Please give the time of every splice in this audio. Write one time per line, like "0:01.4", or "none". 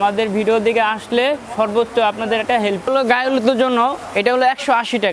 0:02.9